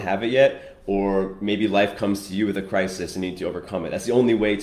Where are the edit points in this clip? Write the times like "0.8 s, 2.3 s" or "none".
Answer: none